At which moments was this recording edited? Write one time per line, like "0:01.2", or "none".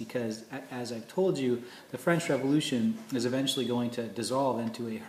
0:03.0